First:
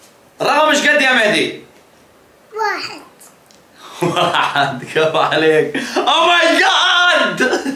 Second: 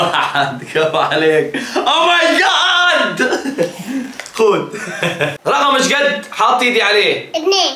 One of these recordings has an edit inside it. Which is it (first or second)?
second